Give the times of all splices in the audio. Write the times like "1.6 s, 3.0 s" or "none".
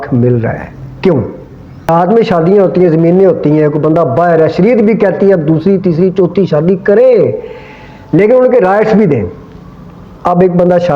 1.9 s